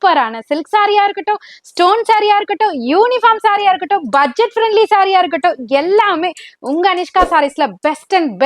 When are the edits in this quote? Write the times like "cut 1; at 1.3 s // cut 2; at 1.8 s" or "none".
none